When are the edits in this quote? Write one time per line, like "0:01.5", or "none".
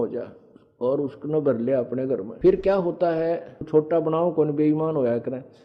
0:02.3
0:03.7